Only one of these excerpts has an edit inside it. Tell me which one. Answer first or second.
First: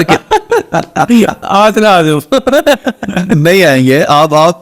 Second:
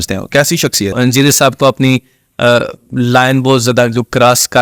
second